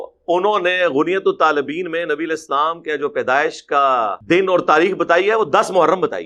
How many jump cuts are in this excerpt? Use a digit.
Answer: 1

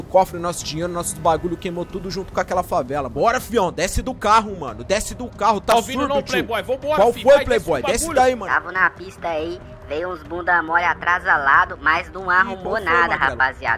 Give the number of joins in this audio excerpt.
2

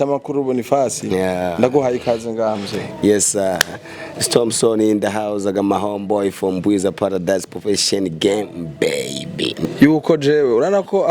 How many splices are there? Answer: 1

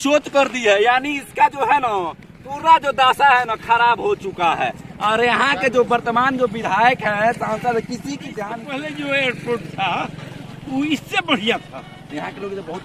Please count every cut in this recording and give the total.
1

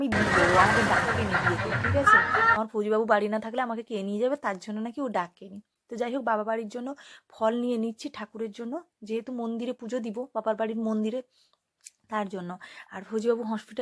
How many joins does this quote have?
0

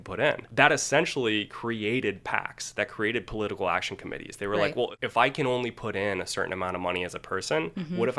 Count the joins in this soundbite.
0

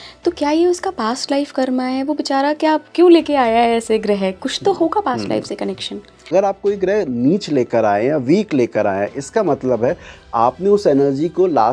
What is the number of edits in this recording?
1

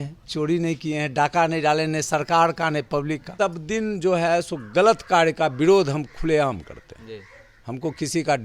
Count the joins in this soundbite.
1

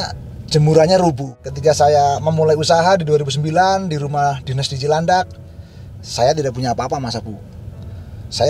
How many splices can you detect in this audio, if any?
1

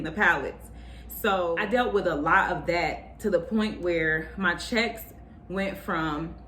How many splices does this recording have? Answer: 1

